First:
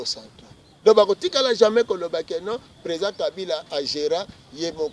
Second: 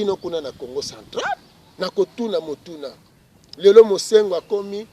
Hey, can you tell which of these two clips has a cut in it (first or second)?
second